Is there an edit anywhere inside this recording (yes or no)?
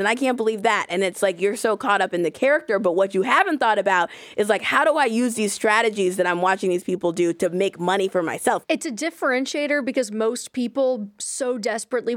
yes